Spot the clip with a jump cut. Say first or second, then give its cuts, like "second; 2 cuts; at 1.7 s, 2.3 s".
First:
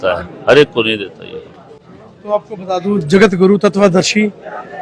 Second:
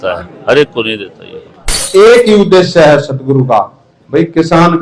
second; 1 cut; at 1.8 s